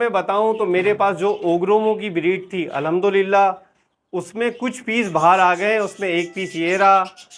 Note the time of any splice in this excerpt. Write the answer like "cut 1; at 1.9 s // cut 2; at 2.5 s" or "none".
none